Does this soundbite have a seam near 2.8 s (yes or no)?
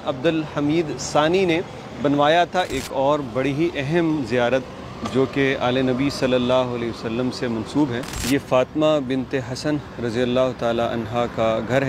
yes